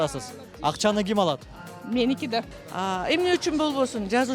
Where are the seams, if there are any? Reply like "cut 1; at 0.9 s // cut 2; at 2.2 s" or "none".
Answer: cut 1; at 2.6 s

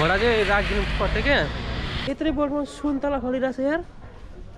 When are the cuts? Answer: cut 1; at 1.9 s

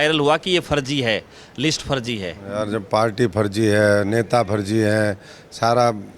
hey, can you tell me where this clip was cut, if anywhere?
none

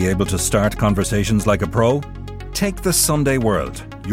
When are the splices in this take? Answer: none

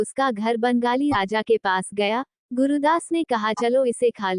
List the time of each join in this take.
cut 1; at 2.4 s

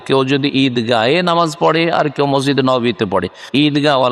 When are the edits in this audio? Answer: none

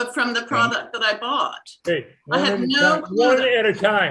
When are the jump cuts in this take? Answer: none

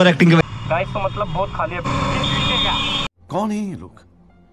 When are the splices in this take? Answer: cut 1; at 1.8 s

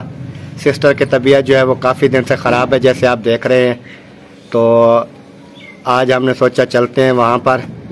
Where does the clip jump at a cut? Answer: none

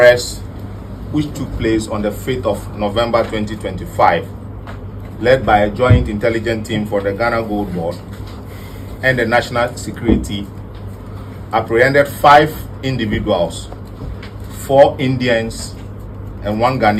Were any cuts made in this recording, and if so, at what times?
none

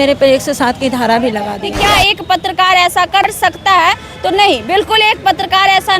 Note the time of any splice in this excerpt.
cut 1; at 1.6 s // cut 2; at 3.4 s

